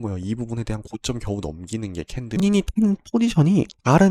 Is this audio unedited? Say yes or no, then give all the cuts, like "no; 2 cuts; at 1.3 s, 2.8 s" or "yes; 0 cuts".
no; 1 cut; at 2.4 s